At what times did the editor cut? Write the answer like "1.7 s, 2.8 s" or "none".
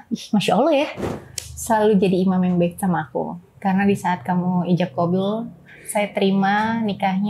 1.0 s